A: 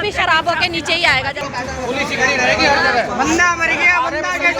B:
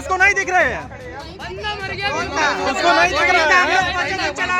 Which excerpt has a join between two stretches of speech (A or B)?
A